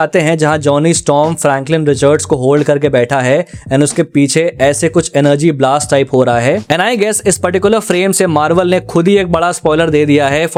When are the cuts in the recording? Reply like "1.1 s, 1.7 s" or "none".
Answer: none